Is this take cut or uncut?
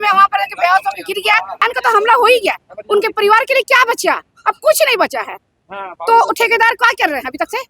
cut